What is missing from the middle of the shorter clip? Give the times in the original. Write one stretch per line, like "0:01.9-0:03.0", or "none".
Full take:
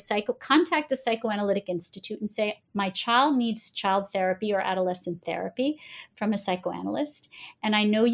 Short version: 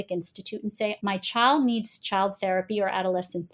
0:02.5-0:02.7